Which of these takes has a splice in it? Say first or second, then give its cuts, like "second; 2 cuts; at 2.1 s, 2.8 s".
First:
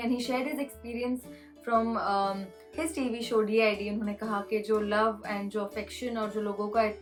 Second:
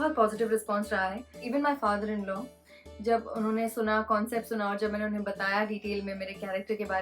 second; 1 cut; at 1.5 s